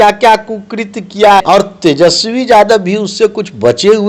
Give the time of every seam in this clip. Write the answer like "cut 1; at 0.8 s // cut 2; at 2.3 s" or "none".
cut 1; at 1.4 s